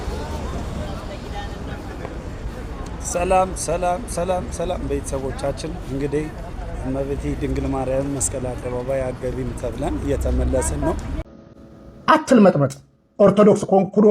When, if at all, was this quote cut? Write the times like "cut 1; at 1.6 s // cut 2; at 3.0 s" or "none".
cut 1; at 11.1 s